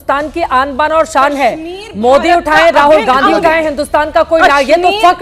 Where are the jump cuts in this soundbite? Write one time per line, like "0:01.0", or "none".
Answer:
none